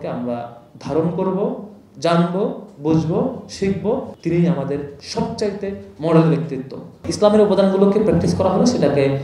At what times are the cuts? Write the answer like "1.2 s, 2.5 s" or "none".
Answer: 4.1 s, 7.1 s